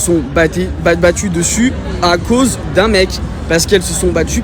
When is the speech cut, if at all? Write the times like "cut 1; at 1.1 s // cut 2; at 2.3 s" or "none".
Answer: none

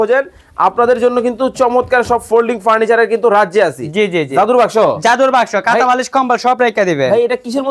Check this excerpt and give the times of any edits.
none

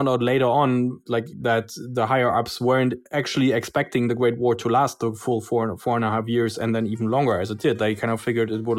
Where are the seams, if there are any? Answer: cut 1; at 1.3 s // cut 2; at 3.1 s

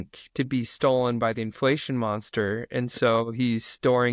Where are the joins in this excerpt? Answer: none

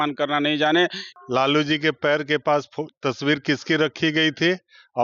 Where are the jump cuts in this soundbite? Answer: cut 1; at 1.0 s

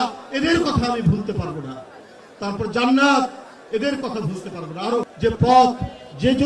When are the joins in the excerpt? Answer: cut 1; at 5.1 s

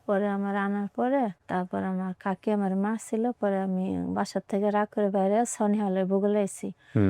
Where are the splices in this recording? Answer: cut 1; at 1.4 s

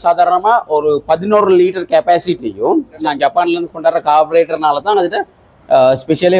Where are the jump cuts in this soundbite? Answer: cut 1; at 2.9 s

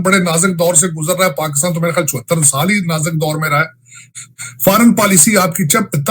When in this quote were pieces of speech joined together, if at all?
cut 1; at 4.1 s

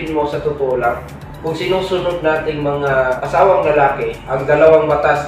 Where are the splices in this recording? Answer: none

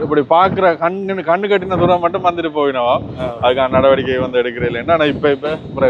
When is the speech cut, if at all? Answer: none

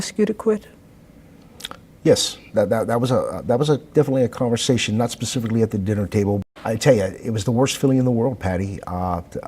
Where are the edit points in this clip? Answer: cut 1; at 6.4 s

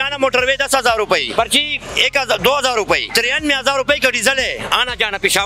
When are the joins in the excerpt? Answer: cut 1; at 1.3 s // cut 2; at 3.1 s

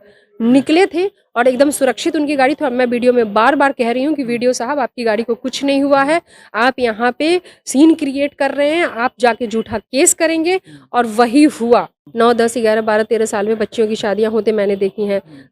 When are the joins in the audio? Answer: cut 1; at 12.0 s

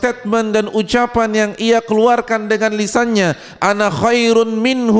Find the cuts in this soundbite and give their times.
none

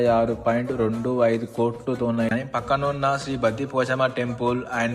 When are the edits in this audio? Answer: cut 1; at 2.3 s

